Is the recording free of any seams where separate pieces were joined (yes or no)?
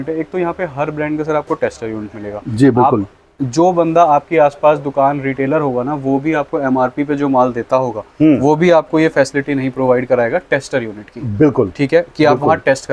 yes